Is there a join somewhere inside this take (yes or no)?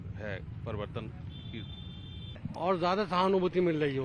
yes